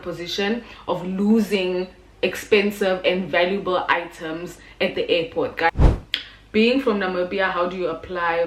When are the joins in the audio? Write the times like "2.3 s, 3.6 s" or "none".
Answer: 5.7 s